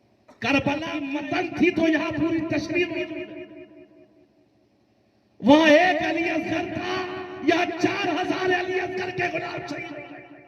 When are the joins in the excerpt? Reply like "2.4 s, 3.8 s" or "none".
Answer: 1.1 s